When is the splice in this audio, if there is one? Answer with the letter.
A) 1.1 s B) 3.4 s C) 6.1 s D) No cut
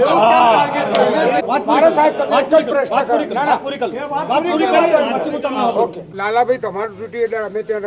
C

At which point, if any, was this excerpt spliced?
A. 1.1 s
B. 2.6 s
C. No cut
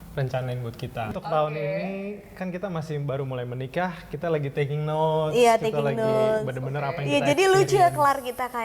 A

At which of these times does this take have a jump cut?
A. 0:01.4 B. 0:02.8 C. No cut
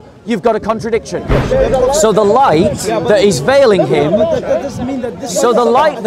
A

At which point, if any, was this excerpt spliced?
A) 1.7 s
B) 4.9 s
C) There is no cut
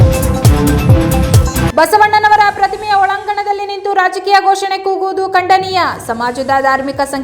A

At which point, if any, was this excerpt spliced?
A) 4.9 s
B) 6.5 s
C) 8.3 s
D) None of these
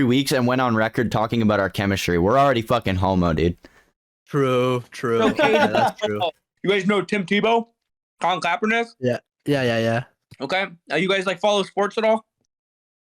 B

